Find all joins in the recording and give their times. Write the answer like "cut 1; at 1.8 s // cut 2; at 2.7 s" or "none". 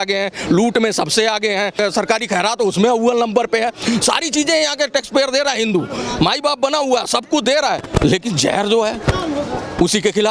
cut 1; at 1.8 s